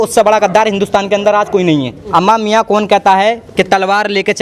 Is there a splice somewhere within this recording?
yes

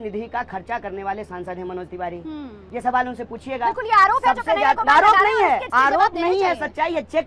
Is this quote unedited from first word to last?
no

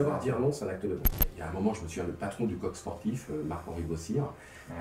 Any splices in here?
yes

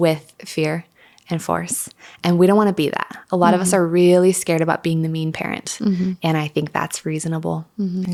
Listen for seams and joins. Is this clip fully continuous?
yes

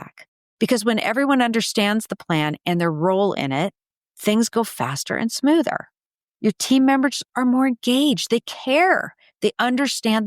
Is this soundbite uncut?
yes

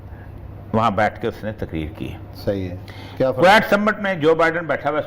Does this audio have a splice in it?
no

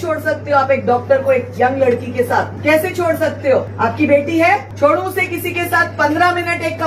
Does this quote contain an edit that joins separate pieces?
yes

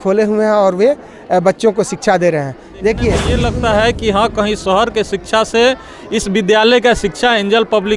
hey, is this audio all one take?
no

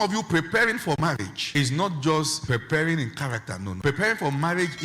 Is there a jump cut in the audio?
yes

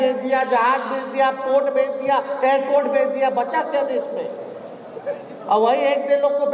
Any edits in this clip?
no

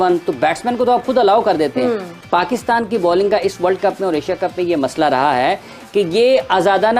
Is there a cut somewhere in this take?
yes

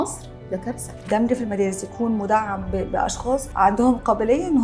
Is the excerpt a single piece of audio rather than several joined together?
no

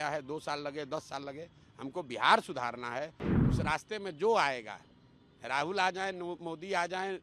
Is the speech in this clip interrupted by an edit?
yes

